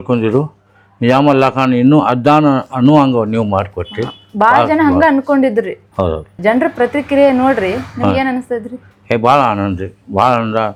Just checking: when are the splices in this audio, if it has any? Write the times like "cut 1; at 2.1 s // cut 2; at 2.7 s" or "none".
none

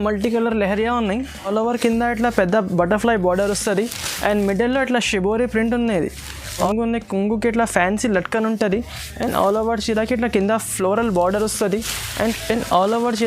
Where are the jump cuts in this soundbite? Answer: cut 1; at 1.5 s // cut 2; at 6.7 s // cut 3; at 12.1 s

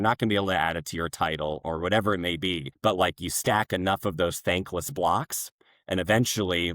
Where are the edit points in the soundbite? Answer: cut 1; at 2.7 s

